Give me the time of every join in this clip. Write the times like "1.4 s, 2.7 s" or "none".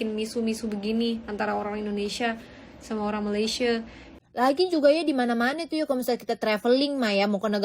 4.2 s